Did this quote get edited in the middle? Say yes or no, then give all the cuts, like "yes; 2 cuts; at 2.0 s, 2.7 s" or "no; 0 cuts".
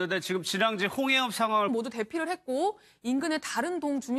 no; 0 cuts